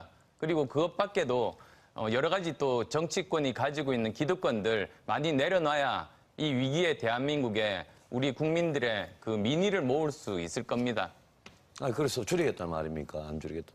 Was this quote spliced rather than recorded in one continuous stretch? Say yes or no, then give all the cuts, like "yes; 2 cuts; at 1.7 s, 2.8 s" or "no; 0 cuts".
yes; 1 cut; at 2.5 s